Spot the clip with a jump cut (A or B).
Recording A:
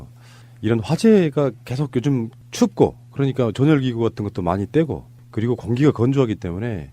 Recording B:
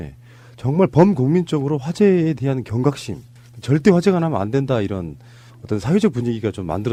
A